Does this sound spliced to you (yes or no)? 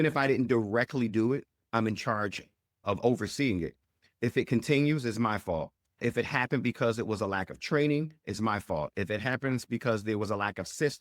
yes